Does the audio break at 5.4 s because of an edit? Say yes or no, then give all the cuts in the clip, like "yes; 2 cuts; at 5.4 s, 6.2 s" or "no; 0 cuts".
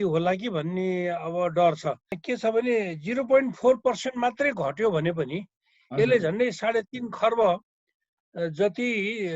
no; 1 cut; at 2.2 s